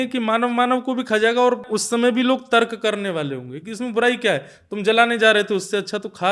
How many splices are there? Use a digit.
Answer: 1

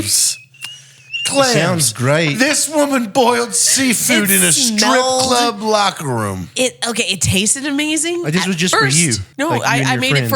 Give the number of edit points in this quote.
1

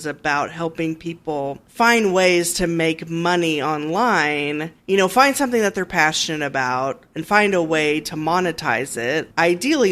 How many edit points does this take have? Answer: 0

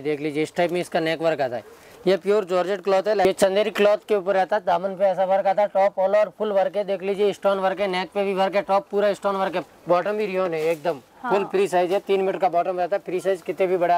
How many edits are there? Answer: 2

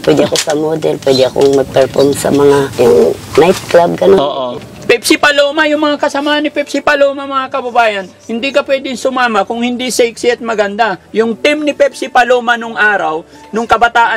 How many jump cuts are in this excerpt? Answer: 2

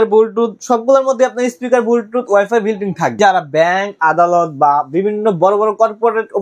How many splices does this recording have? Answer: 1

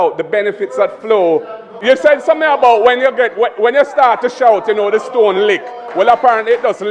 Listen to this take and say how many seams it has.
1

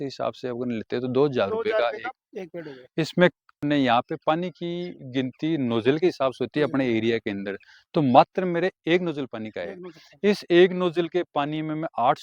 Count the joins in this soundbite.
1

